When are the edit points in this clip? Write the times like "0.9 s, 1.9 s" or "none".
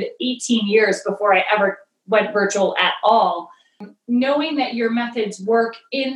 3.8 s